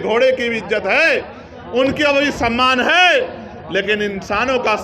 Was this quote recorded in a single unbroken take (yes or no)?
yes